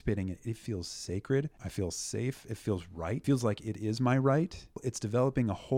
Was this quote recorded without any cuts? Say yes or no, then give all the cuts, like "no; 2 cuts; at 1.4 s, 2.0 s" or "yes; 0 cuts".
no; 3 cuts; at 1.6 s, 3.2 s, 4.9 s